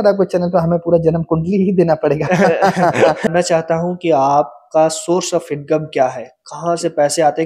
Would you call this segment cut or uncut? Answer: cut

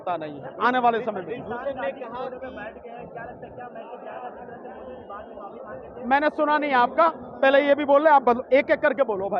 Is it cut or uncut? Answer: uncut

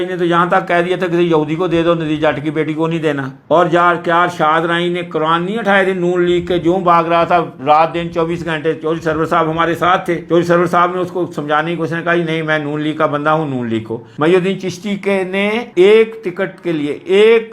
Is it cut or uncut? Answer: uncut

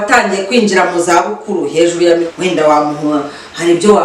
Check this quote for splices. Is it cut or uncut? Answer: cut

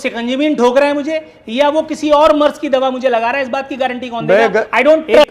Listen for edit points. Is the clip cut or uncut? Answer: uncut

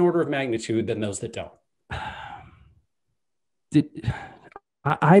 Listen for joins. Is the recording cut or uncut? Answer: cut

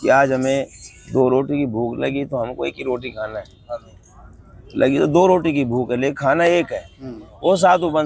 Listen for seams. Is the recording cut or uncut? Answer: uncut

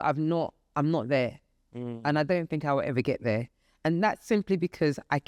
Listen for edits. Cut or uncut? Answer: uncut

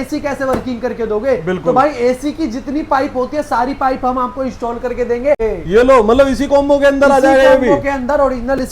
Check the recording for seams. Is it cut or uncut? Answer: cut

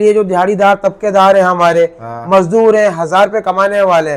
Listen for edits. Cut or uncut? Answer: uncut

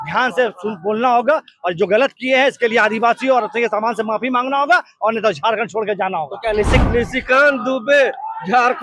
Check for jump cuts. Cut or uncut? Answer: cut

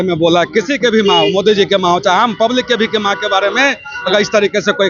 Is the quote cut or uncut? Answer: uncut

